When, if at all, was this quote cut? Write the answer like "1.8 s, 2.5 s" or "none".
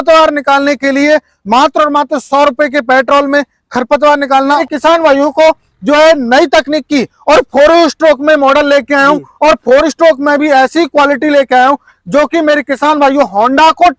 4.6 s